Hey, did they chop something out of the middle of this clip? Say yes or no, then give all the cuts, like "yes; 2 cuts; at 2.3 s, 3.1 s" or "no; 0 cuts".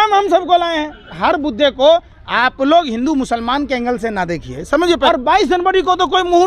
yes; 2 cuts; at 1.1 s, 5.1 s